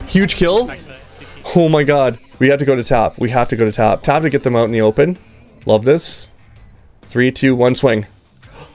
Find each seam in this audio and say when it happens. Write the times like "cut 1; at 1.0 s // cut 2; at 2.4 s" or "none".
cut 1; at 2.2 s // cut 2; at 4.0 s